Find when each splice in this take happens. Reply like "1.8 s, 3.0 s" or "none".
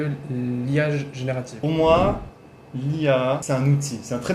1.5 s, 3.4 s